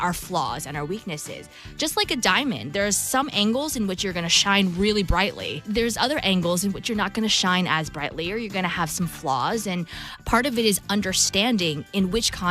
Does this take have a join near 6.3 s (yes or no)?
no